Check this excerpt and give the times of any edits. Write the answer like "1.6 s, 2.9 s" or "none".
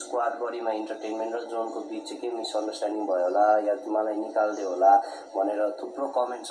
none